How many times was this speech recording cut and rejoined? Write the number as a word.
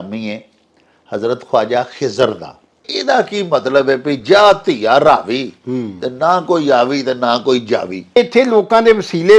two